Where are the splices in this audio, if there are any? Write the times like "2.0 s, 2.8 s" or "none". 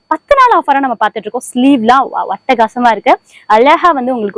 none